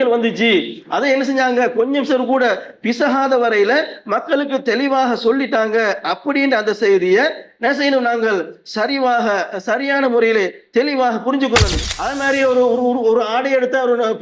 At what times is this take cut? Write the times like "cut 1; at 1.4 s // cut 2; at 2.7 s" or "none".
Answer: cut 1; at 11.8 s